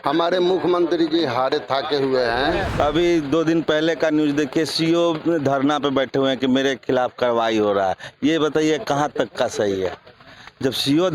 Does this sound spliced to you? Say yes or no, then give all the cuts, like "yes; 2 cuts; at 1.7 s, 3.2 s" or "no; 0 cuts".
yes; 1 cut; at 2.7 s